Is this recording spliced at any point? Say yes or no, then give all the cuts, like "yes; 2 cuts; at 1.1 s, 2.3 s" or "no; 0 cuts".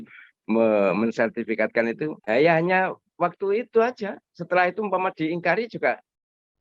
yes; 1 cut; at 2.2 s